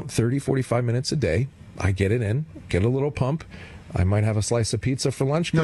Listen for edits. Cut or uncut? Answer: uncut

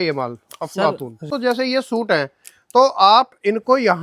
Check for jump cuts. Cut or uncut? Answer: cut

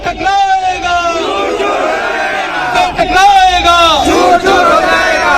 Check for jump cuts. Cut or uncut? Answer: uncut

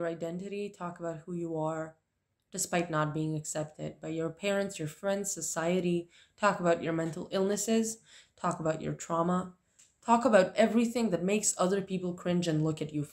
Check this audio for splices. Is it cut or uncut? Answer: uncut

